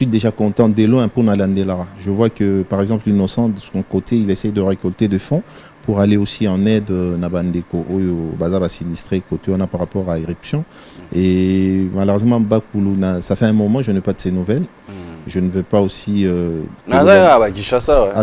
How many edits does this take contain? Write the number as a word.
zero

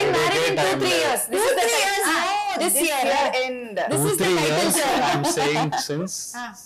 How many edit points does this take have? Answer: zero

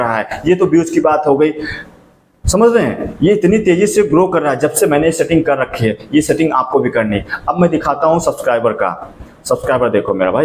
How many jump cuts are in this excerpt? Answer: zero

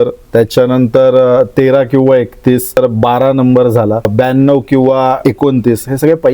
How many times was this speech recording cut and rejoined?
three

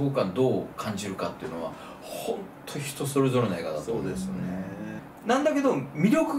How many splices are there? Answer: one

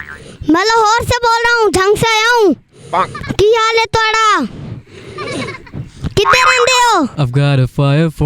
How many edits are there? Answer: one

